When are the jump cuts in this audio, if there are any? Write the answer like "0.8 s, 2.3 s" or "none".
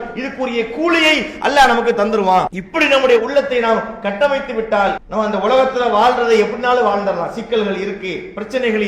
2.6 s, 5.0 s

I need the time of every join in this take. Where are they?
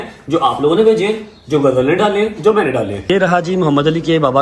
3.0 s

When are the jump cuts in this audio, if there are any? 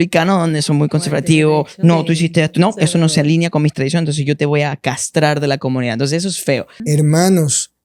6.8 s

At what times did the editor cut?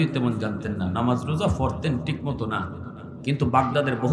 3.1 s

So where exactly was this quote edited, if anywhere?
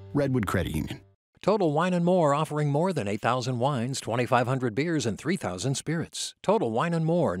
1.1 s

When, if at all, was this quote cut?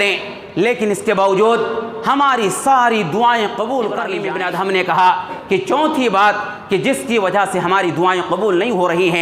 4.2 s

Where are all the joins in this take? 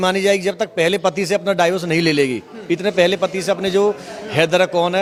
none

